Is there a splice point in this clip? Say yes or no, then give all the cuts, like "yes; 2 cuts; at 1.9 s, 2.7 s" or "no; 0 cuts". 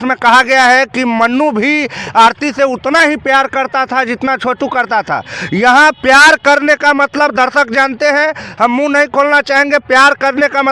no; 0 cuts